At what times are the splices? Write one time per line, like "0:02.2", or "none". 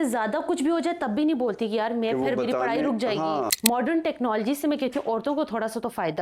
0:03.5